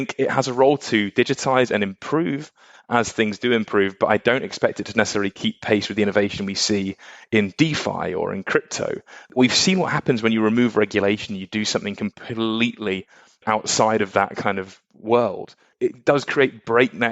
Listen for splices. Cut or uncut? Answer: cut